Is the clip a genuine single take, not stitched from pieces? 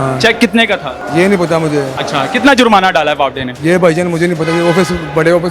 no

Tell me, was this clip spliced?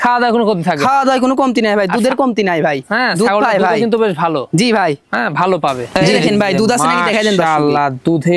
yes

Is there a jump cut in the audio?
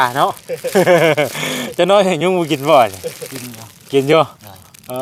no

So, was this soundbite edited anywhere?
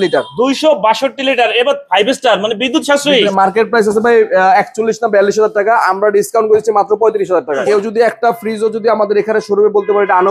yes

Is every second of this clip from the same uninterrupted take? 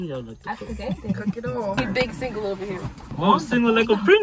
no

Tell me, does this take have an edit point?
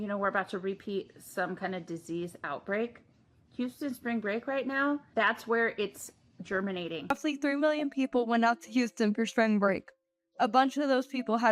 yes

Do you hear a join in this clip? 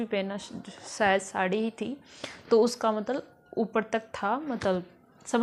no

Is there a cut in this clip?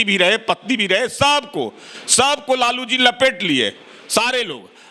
no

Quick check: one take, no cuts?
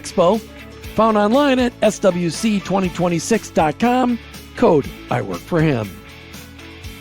no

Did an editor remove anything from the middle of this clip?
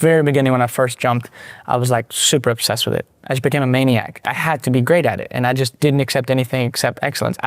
yes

